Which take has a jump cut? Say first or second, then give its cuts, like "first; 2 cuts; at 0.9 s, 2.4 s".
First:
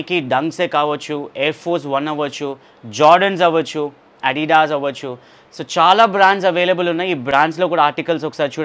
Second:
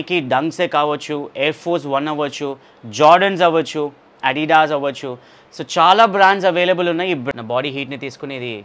second; 1 cut; at 7.2 s